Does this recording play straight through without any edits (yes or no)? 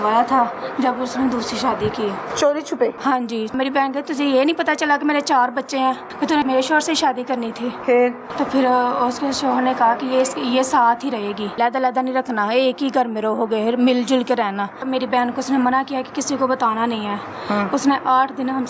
no